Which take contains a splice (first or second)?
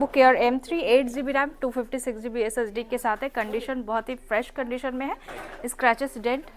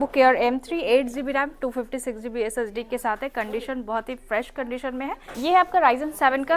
second